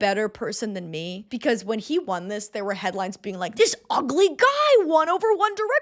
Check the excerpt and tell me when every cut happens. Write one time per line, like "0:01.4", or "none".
none